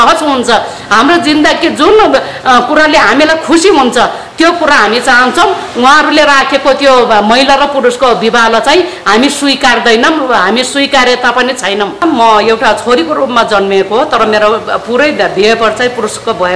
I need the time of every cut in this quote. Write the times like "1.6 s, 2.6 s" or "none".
12.0 s